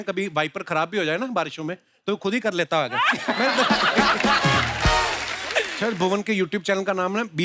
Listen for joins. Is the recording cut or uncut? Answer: cut